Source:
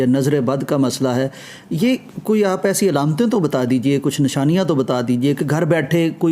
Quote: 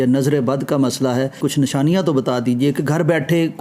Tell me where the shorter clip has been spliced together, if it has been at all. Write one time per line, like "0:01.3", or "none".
0:01.4